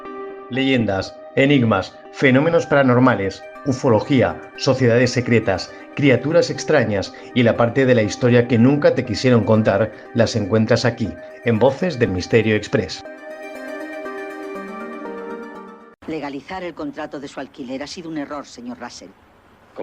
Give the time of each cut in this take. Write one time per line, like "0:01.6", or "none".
0:15.9

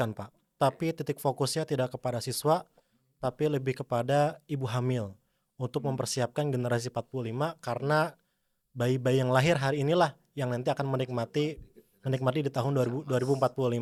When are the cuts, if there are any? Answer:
none

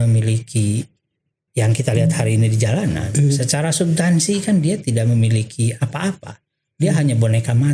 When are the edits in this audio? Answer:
none

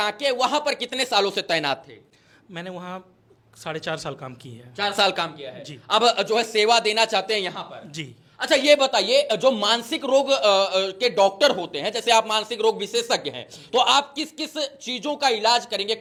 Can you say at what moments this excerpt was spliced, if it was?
none

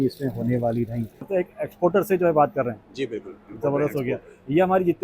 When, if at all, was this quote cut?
0:01.3

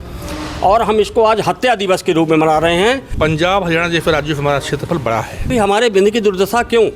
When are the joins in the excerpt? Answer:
0:03.1
0:05.5

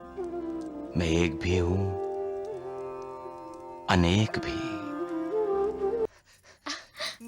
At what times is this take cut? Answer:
0:06.1

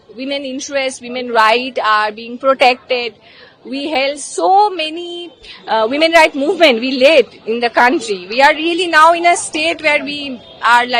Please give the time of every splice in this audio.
none

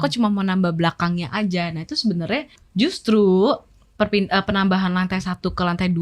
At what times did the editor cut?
0:02.6

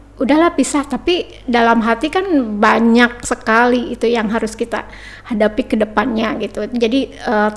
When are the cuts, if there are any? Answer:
none

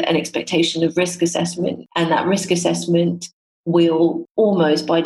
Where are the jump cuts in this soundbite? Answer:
0:01.8
0:04.2

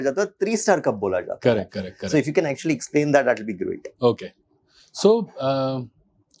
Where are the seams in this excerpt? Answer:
none

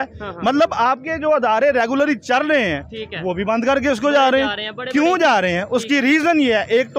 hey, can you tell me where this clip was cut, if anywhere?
none

